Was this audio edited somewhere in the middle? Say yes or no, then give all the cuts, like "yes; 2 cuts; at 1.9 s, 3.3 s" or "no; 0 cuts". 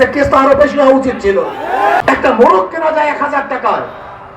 yes; 1 cut; at 2.0 s